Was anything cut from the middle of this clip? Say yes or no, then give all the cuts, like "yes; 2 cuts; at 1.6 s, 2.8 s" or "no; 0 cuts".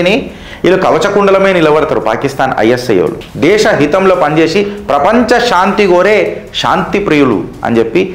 yes; 1 cut; at 3.2 s